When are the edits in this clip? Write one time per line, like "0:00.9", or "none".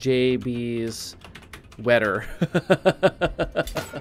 none